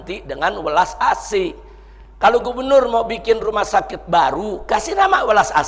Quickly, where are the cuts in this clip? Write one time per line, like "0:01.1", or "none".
none